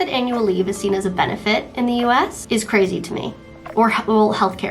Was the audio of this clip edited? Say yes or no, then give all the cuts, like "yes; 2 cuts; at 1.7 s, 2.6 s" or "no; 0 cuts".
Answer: yes; 1 cut; at 2.4 s